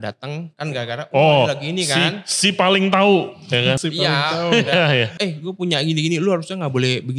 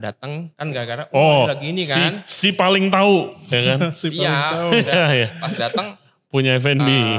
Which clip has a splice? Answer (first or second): first